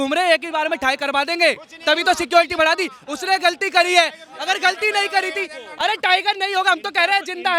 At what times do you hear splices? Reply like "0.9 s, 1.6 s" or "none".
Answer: none